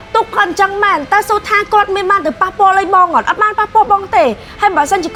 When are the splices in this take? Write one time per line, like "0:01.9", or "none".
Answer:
none